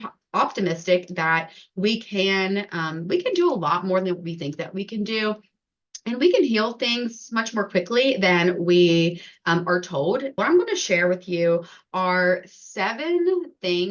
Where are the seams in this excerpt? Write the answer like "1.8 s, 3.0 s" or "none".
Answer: 10.3 s